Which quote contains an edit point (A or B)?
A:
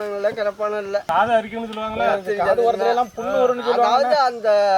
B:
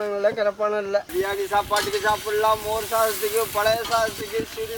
B